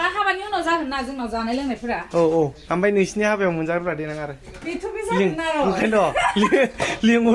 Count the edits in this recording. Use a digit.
0